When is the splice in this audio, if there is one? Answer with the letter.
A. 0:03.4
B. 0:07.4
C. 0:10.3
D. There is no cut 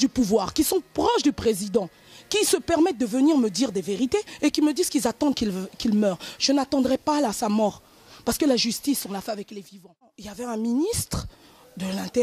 C